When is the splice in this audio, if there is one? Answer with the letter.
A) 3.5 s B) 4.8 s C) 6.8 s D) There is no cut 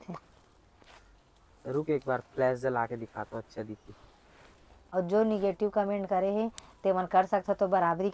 B